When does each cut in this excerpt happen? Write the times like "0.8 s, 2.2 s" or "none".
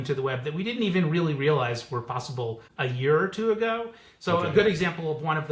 2.6 s